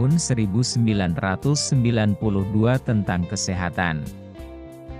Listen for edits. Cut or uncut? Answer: cut